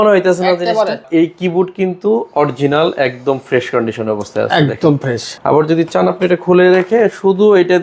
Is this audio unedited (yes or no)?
no